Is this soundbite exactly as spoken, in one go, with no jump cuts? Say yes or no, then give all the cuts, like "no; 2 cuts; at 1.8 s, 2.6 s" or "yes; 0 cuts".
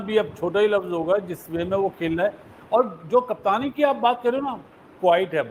yes; 0 cuts